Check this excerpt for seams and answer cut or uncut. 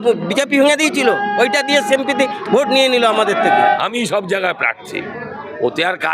cut